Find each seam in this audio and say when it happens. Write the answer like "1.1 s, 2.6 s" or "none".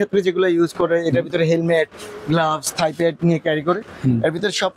none